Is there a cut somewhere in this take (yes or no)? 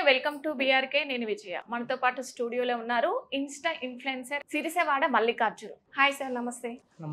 yes